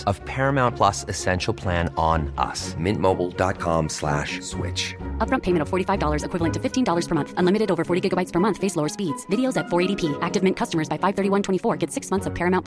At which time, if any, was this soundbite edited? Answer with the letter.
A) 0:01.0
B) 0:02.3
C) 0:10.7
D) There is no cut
D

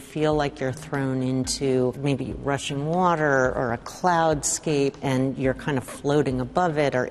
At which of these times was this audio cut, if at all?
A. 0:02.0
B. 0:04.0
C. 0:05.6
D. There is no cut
A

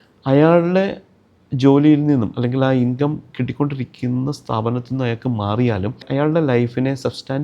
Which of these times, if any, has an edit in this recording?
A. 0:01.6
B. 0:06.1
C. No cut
B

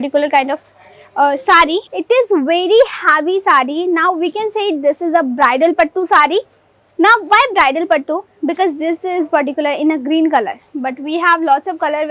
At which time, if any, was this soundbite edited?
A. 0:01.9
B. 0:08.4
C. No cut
A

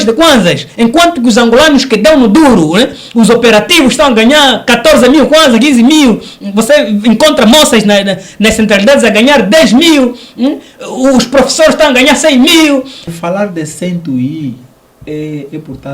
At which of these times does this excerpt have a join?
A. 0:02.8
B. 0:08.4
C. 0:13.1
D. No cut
C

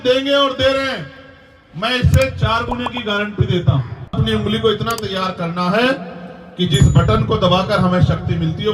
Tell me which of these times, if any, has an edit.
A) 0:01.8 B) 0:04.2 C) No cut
B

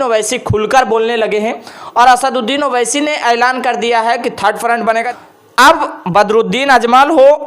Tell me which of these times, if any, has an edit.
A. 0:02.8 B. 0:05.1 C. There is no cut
B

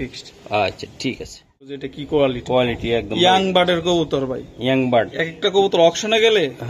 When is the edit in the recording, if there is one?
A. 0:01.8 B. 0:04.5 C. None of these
A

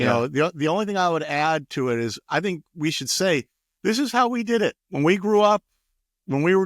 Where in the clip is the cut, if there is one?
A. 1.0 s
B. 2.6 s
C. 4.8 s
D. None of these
C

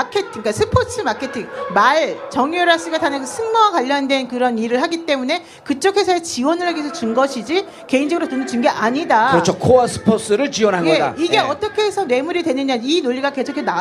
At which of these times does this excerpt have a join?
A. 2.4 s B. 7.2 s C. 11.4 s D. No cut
D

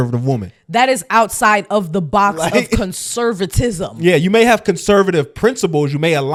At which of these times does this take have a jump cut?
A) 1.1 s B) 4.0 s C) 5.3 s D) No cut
D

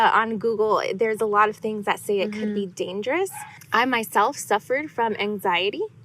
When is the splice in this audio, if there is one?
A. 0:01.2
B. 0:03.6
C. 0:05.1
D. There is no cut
B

